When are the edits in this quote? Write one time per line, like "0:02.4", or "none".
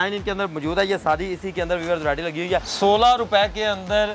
0:02.7